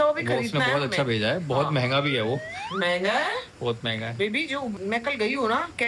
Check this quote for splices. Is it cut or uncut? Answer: cut